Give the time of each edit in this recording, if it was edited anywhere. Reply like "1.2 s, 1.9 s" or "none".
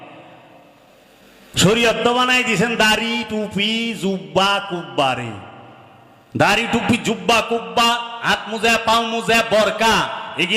none